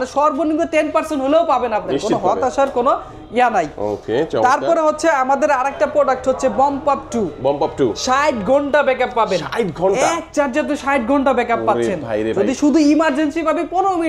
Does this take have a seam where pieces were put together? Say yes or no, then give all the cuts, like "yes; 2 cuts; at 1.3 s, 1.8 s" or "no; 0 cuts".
no; 0 cuts